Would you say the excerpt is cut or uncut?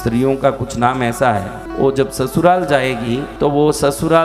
cut